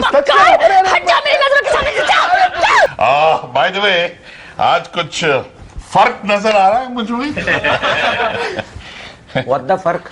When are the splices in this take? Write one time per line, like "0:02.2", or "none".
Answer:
0:02.9